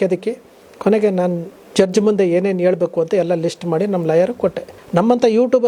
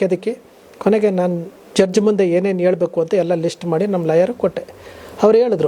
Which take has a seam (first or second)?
first